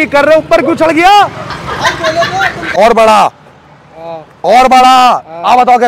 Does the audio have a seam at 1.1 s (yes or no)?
no